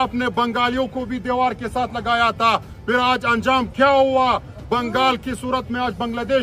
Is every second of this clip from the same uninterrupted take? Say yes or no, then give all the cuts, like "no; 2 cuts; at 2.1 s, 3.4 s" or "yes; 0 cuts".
yes; 0 cuts